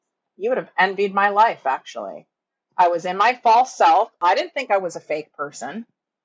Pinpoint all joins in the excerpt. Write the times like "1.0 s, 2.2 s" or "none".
4.1 s